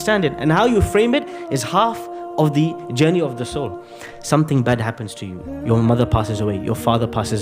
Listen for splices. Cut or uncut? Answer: uncut